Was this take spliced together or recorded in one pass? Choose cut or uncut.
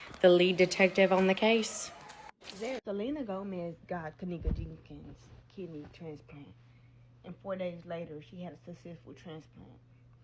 cut